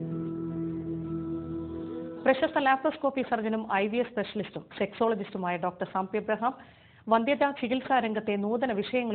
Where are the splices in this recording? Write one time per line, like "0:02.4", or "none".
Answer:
0:02.0